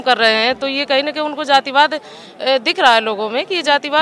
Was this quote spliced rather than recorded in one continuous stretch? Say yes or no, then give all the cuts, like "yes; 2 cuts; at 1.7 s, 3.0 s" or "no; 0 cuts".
no; 0 cuts